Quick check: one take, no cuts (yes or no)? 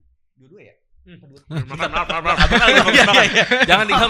yes